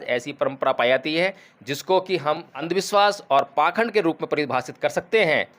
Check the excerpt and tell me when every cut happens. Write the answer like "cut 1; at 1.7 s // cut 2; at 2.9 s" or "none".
cut 1; at 2.6 s